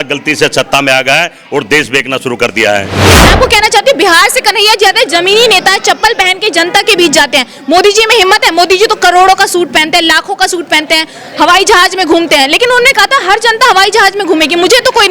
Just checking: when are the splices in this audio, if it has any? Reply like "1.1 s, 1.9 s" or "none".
3.1 s